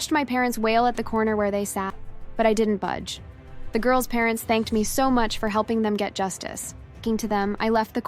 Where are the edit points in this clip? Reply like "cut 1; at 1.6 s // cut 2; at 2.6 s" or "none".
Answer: cut 1; at 7.0 s